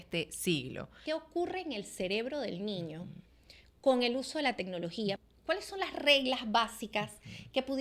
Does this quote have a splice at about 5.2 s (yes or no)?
yes